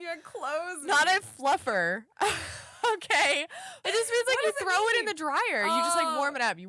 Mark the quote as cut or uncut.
cut